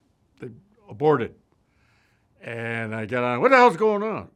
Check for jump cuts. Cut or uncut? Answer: uncut